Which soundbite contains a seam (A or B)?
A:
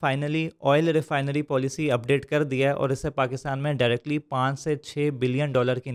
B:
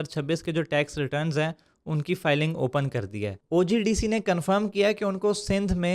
B